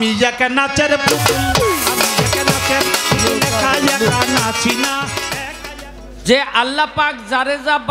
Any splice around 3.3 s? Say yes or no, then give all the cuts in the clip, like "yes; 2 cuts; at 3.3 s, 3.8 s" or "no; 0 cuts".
no; 1 cut; at 5.5 s